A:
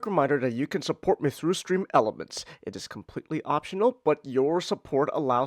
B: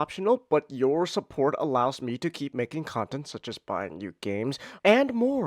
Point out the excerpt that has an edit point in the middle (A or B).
B